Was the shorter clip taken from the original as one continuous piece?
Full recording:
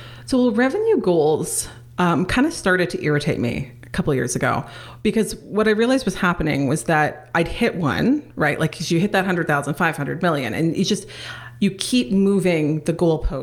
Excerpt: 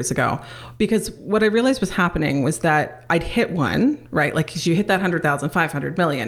yes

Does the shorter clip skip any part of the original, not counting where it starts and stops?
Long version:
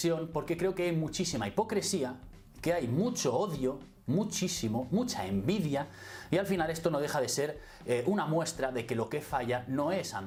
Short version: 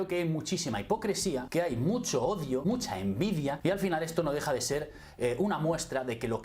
yes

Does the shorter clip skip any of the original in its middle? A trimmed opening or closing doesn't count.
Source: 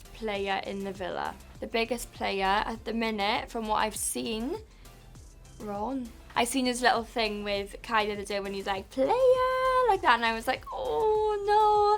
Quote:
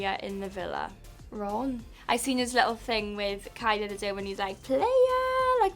yes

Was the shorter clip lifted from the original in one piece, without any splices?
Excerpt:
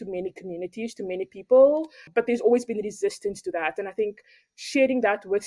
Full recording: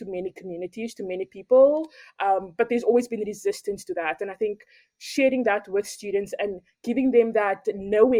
no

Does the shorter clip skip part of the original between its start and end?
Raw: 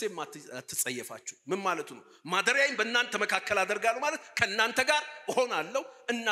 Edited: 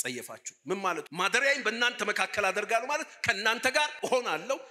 yes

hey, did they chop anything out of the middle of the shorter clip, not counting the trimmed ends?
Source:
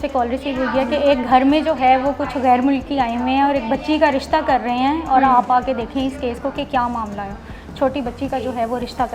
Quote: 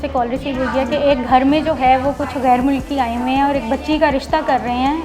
no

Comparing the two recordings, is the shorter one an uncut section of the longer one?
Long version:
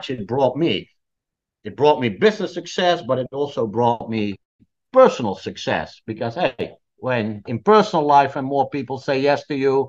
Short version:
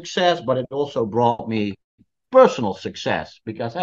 yes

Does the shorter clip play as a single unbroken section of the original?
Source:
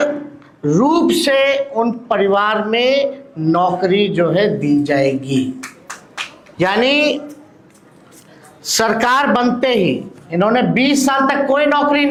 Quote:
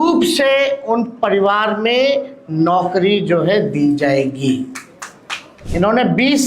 no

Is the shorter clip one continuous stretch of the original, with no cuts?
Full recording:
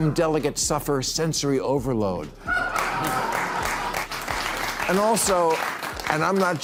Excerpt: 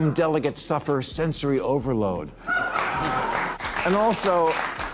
no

